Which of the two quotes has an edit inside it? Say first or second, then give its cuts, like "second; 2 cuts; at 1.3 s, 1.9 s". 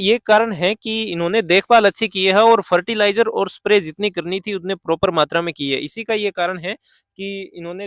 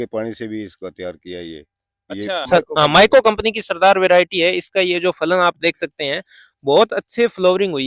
second; 1 cut; at 2.5 s